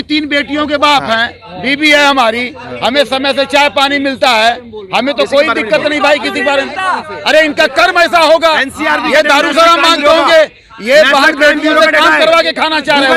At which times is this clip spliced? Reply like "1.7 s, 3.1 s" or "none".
none